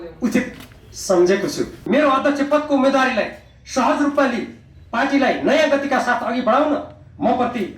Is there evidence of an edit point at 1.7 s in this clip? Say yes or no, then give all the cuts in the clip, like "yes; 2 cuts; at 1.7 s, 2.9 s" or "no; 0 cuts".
yes; 1 cut; at 1.7 s